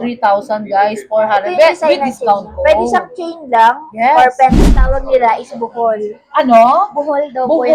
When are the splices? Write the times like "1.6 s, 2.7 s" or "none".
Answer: 4.6 s